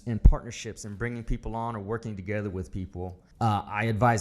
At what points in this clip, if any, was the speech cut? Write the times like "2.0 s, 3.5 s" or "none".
3.2 s